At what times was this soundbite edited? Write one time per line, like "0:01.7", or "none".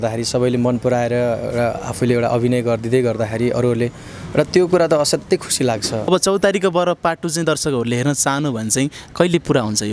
0:06.1